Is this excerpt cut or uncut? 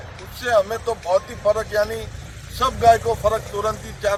uncut